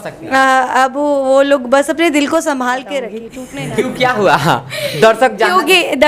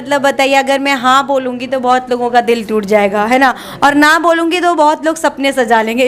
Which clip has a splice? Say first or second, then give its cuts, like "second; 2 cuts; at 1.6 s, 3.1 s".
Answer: first; 1 cut; at 3.3 s